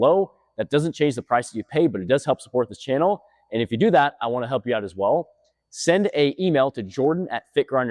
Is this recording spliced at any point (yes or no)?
no